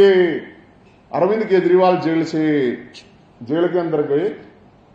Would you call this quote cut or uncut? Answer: uncut